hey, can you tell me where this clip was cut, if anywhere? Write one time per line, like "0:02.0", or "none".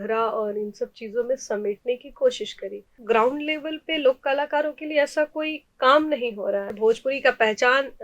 0:02.9
0:06.7